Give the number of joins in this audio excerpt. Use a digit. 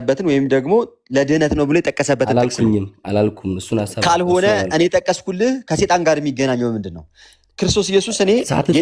0